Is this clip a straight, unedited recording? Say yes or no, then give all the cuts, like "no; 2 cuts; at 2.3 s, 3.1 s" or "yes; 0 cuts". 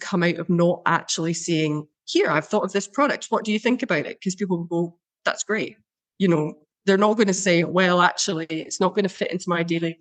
yes; 0 cuts